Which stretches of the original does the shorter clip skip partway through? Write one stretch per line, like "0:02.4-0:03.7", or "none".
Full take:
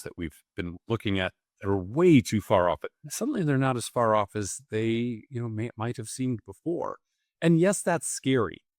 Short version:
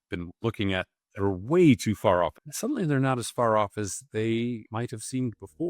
0:02.9-0:03.0
0:05.3-0:05.7